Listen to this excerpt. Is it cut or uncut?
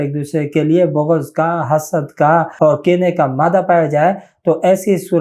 cut